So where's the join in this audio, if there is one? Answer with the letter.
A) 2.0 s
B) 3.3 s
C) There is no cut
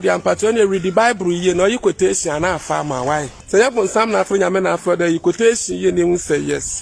B